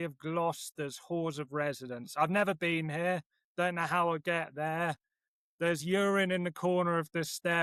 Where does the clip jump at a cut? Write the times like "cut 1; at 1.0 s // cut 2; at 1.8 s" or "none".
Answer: none